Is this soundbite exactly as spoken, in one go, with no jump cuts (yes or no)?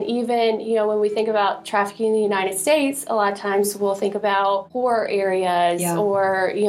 yes